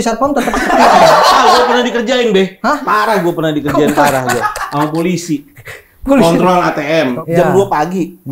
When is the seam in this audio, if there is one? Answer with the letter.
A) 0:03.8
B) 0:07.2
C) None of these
B